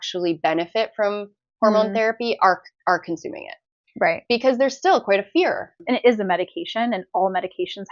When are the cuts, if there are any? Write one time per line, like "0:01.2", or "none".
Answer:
0:05.8